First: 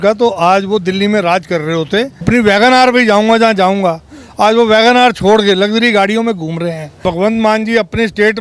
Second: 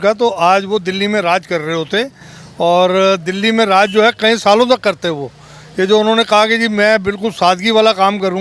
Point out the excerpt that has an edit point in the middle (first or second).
first